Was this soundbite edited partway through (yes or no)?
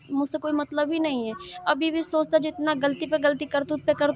no